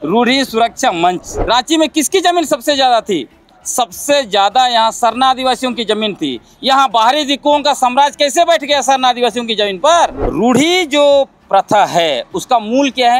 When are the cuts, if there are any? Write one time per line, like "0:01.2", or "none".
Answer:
0:01.3
0:10.2